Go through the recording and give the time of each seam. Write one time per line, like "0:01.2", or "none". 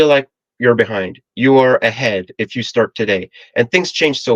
none